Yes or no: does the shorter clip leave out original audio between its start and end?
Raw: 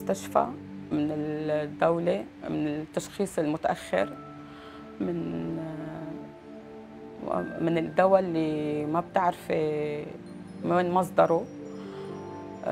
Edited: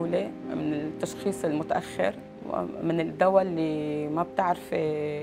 yes